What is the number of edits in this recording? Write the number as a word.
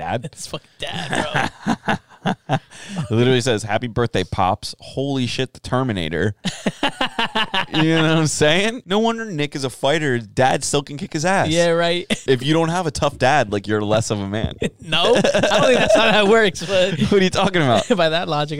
two